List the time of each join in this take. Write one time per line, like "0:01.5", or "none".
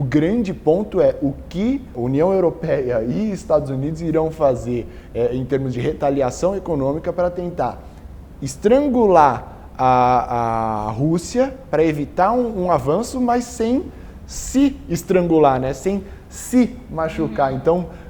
0:02.0